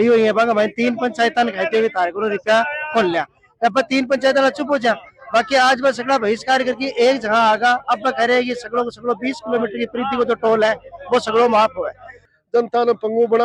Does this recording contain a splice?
yes; 1 cut; at 12.2 s

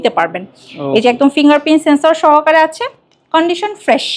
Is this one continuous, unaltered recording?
yes; 0 cuts

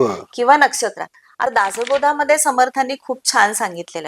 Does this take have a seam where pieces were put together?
yes; 1 cut; at 1.5 s

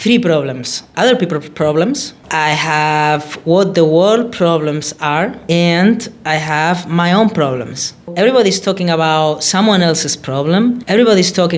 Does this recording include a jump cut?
yes; 1 cut; at 0.9 s

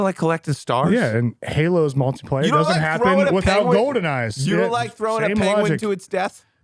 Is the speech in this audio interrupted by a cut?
no; 0 cuts

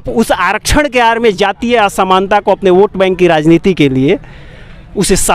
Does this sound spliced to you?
no; 0 cuts

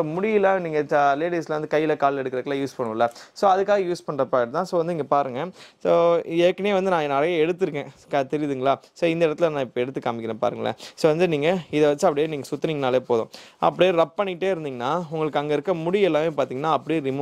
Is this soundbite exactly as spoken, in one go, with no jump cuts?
yes; 0 cuts

